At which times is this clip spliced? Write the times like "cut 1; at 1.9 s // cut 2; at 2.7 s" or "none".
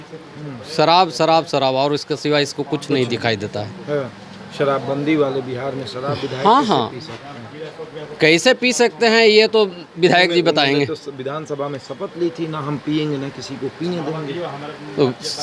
none